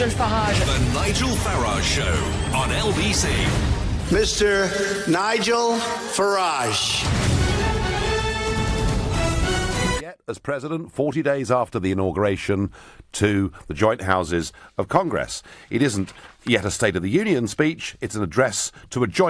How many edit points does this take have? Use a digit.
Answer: 0